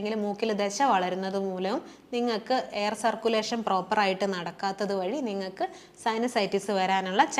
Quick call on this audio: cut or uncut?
uncut